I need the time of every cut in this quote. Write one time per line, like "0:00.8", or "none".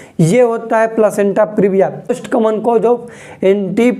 0:02.2